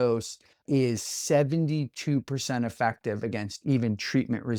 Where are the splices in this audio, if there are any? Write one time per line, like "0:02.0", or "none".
none